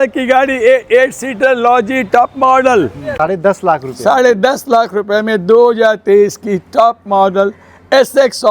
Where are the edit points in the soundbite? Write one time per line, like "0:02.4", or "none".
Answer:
0:03.0